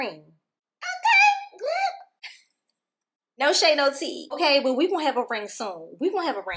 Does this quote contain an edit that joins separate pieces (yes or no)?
yes